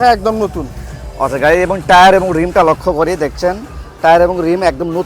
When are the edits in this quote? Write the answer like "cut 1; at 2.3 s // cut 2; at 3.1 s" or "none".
none